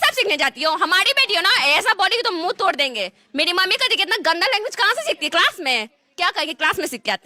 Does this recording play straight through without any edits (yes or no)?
yes